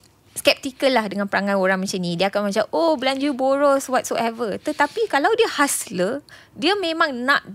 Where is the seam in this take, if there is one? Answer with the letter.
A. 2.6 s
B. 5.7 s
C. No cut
C